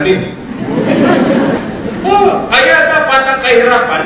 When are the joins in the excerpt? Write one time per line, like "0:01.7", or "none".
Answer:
0:01.6